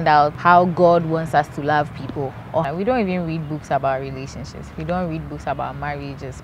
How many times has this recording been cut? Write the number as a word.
one